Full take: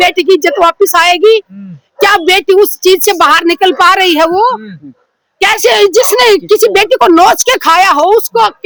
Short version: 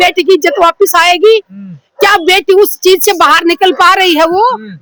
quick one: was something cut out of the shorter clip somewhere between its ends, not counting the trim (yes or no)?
no